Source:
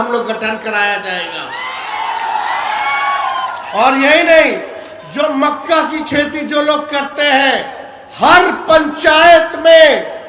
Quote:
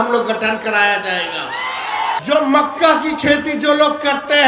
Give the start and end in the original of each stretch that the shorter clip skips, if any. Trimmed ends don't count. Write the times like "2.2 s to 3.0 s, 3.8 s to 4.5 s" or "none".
2.2 s to 5.1 s